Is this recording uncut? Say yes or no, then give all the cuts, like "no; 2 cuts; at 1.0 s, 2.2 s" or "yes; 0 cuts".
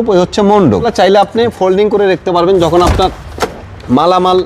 no; 1 cut; at 0.9 s